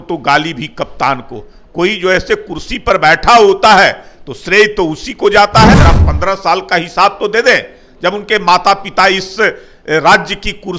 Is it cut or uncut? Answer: cut